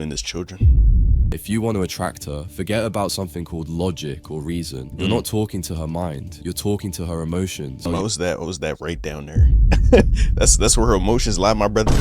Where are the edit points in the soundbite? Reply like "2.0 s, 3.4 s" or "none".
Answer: 1.3 s, 7.8 s